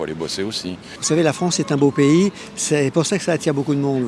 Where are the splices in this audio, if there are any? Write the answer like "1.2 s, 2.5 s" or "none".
0.9 s